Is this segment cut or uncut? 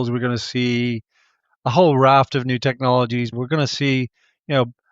cut